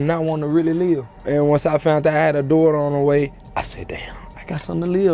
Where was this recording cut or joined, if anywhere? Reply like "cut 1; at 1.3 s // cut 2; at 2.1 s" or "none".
cut 1; at 1.1 s // cut 2; at 3.4 s